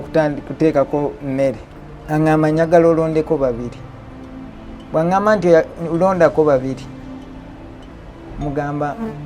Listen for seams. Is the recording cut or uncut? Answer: cut